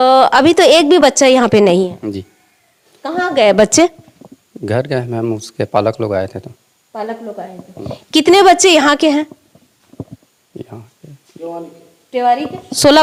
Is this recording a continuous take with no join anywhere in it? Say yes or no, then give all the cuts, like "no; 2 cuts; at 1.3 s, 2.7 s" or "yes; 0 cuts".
yes; 0 cuts